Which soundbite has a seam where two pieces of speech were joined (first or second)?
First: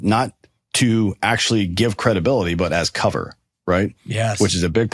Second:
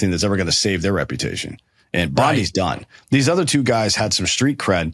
second